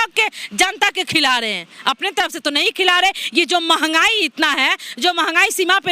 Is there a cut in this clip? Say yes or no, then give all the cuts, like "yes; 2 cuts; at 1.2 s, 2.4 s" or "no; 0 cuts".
no; 0 cuts